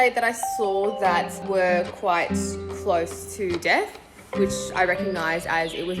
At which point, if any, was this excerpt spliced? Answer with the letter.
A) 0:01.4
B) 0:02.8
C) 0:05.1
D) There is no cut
A